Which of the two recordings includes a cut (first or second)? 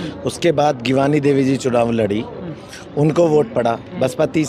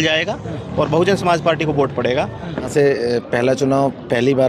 second